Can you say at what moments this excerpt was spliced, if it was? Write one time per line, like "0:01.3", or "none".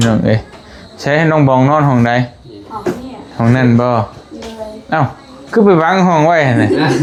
none